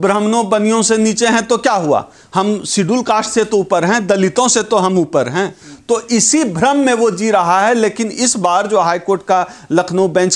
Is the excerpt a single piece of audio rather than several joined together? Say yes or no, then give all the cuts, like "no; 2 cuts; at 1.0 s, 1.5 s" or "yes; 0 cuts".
yes; 0 cuts